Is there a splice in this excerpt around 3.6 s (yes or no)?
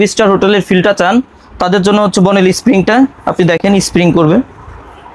no